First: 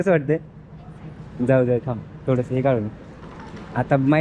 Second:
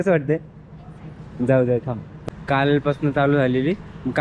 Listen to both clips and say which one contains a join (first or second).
second